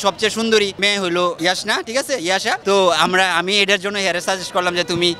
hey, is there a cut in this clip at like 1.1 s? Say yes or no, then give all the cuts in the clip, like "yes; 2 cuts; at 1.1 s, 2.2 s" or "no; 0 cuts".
yes; 2 cuts; at 1.1 s, 2.6 s